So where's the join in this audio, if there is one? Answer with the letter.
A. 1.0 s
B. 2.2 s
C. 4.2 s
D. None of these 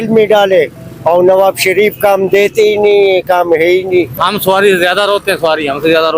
C